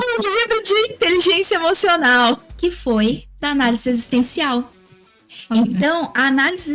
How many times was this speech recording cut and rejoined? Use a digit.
1